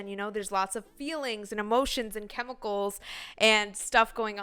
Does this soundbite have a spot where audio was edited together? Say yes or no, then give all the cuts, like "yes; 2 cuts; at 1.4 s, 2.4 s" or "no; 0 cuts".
no; 0 cuts